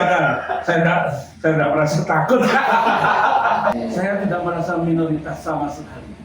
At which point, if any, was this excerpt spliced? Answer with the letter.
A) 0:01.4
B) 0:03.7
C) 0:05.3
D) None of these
B